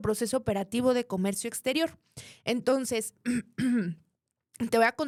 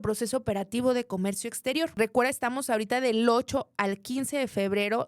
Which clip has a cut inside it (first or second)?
second